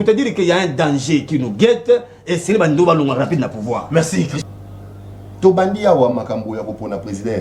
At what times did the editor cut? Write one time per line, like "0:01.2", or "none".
0:04.4